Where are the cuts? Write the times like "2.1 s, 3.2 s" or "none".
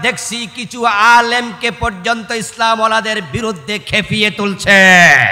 none

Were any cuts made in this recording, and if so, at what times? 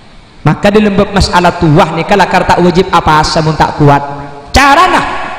none

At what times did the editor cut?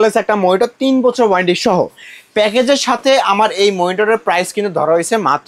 none

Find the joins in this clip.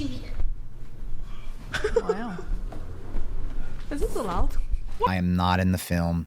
5.1 s

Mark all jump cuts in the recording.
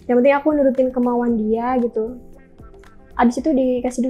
none

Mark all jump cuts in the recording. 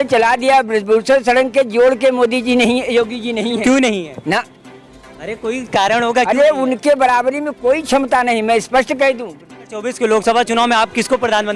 9.3 s

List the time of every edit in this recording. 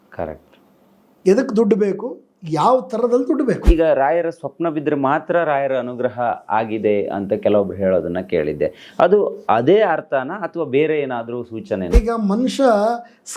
3.6 s, 11.9 s

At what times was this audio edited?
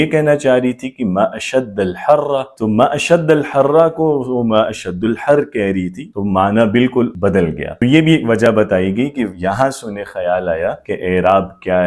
none

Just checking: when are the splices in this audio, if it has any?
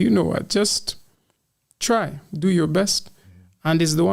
none

